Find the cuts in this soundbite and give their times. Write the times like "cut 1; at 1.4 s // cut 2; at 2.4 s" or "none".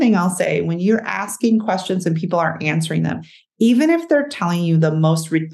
none